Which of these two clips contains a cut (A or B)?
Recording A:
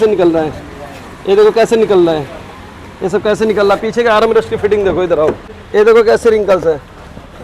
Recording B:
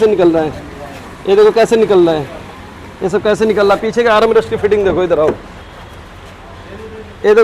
A